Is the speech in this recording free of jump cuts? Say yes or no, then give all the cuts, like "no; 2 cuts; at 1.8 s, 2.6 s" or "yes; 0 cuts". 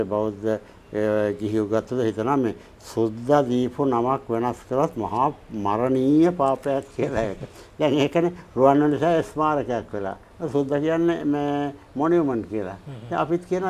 yes; 0 cuts